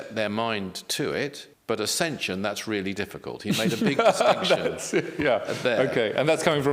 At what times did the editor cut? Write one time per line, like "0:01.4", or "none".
0:01.5